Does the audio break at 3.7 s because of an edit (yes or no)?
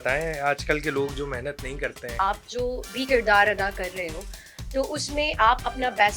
no